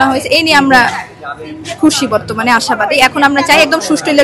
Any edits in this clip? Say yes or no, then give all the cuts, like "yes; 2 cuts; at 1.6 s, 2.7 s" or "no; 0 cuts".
no; 0 cuts